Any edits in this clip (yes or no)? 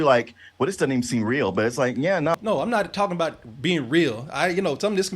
yes